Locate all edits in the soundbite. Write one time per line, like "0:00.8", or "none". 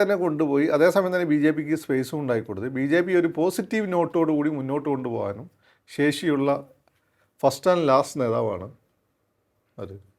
none